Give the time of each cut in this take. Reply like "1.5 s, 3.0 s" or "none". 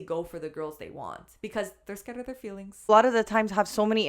2.9 s